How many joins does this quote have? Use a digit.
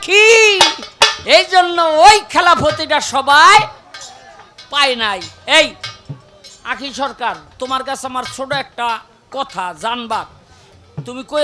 1